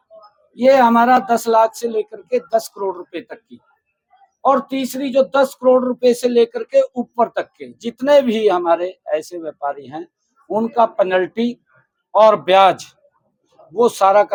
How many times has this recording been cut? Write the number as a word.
zero